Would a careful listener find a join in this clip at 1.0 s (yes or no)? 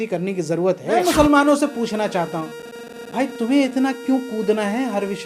yes